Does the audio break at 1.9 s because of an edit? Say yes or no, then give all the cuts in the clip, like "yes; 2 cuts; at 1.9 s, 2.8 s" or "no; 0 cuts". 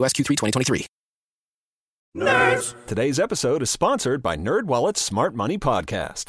yes; 1 cut; at 1.9 s